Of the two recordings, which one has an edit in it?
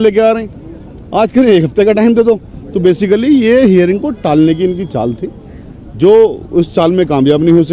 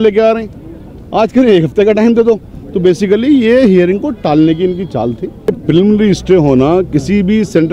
second; 1 cut; at 5.6 s

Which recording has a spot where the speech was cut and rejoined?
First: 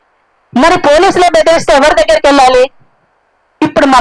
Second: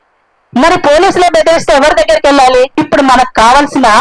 second; 1 cut; at 2.7 s

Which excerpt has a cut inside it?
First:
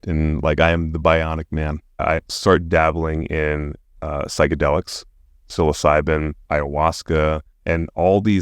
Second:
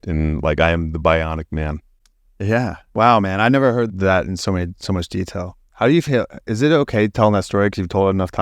first; 2 cuts; at 2.0 s, 6.4 s

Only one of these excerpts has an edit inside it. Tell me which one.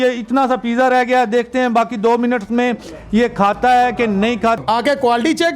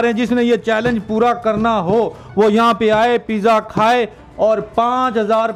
first; 1 cut; at 4.6 s

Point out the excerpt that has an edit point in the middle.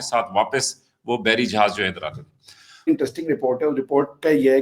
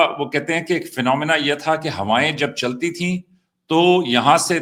first; 1 cut; at 2.9 s

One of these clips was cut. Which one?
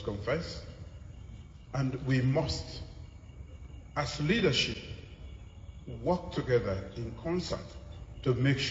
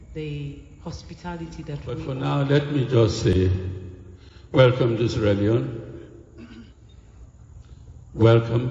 second; 1 cut; at 2.0 s

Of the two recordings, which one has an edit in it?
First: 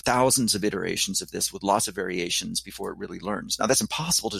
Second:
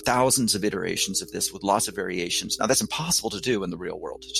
second; 1 cut; at 2.5 s

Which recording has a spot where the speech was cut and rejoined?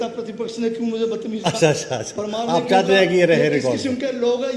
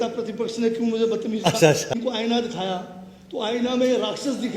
second; 1 cut; at 1.9 s

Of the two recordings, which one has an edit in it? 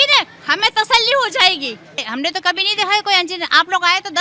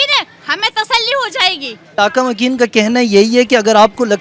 first; 1 cut; at 1.9 s

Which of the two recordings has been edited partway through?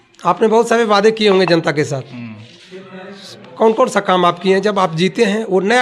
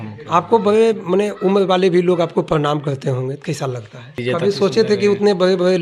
second; 1 cut; at 4.2 s

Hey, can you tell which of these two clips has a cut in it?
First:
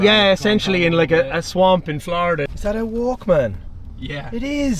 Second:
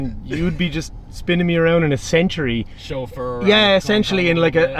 first; 1 cut; at 2.5 s

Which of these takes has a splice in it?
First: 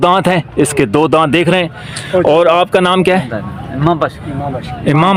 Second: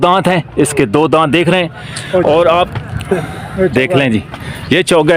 second; 1 cut; at 2.7 s

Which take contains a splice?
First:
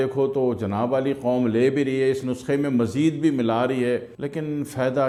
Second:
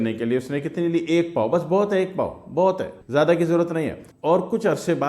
second; 1 cut; at 4.0 s

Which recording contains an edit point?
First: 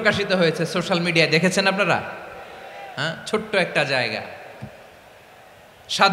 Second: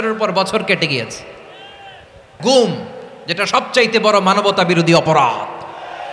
second; 1 cut; at 2.3 s

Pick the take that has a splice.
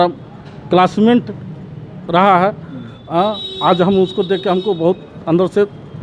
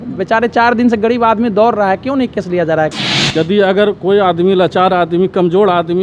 second; 1 cut; at 3.2 s

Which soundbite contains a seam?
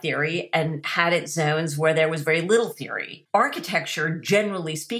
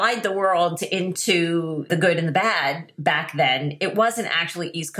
second; 1 cut; at 1.9 s

